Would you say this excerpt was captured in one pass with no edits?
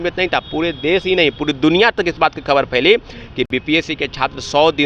yes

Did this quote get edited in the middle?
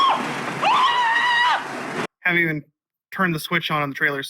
yes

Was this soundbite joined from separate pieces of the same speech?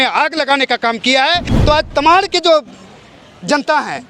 yes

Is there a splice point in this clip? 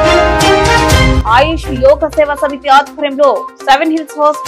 yes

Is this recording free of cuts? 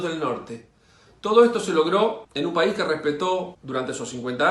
no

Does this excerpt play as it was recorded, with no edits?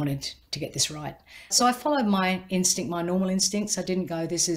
no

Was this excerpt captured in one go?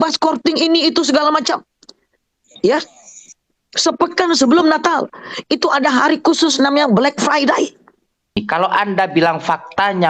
no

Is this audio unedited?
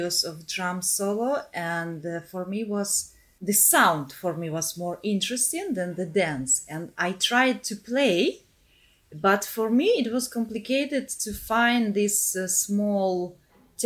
yes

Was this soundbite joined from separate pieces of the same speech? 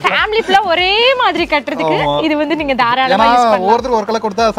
no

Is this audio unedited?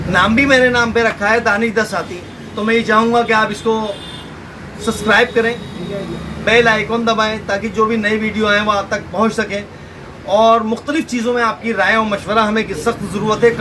yes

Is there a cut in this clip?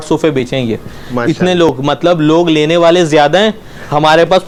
no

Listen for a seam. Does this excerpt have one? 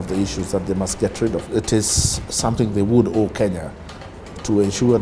yes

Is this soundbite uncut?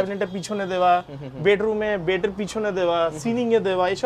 yes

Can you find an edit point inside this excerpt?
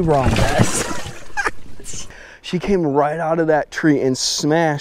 yes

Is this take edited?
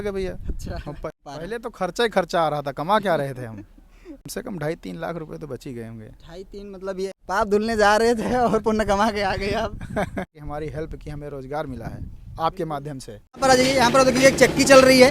yes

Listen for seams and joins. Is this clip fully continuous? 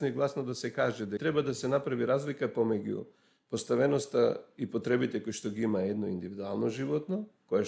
no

